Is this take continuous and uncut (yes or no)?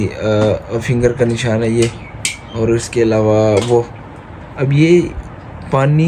yes